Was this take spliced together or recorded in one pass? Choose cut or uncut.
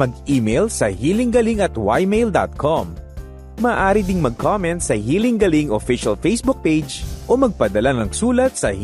uncut